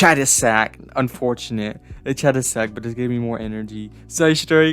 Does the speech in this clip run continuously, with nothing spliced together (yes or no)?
yes